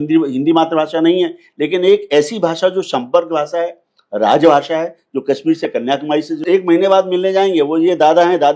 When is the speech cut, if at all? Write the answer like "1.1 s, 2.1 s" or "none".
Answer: 6.4 s